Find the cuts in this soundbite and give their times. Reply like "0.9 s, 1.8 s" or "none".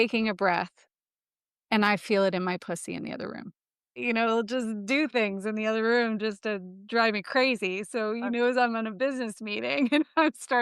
4.0 s